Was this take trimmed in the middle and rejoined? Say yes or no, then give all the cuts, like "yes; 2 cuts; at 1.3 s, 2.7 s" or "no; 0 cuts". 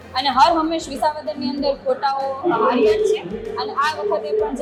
no; 0 cuts